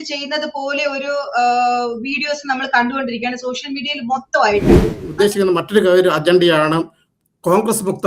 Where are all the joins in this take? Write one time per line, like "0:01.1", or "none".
0:04.9